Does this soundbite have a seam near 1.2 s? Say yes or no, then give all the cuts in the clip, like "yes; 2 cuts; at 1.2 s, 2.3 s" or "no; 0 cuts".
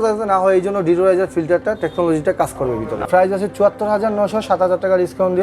no; 1 cut; at 3.0 s